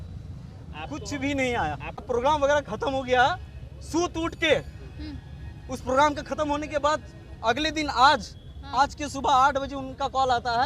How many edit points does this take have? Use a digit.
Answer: 1